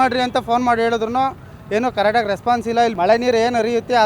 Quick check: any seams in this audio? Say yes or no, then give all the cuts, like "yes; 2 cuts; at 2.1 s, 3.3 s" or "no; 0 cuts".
yes; 1 cut; at 2.9 s